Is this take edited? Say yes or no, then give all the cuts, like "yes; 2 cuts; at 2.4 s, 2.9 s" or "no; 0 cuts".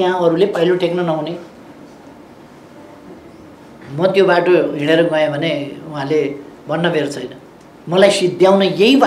no; 0 cuts